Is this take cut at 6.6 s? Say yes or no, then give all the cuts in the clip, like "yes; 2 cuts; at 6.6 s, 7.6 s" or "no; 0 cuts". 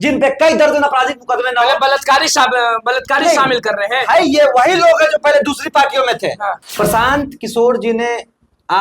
yes; 1 cut; at 6.6 s